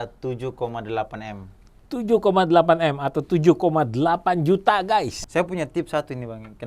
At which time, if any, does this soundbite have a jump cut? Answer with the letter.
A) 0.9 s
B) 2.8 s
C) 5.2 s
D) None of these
C